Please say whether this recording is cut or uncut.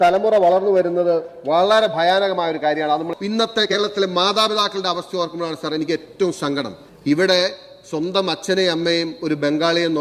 cut